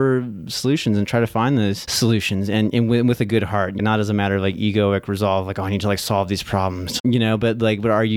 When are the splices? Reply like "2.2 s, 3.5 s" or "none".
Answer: 1.9 s, 3.8 s, 7.0 s